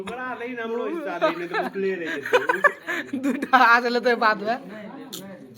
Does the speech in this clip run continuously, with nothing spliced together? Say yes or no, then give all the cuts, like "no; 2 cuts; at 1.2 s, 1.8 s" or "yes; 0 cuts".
yes; 0 cuts